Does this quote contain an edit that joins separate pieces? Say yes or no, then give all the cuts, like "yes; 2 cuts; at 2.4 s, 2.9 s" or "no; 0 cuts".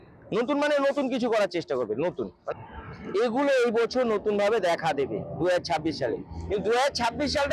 yes; 1 cut; at 2.5 s